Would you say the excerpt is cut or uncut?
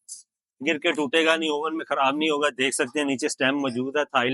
uncut